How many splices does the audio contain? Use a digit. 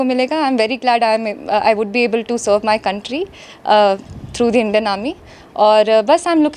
0